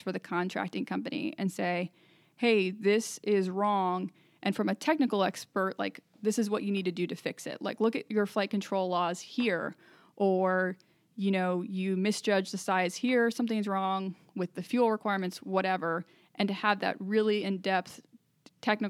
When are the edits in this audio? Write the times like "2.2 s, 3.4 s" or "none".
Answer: none